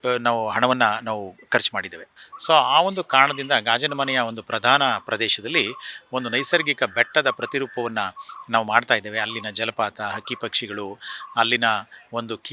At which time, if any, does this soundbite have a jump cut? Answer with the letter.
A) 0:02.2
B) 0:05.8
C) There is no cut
A